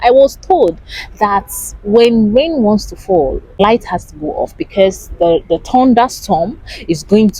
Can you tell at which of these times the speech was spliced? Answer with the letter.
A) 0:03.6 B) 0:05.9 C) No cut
A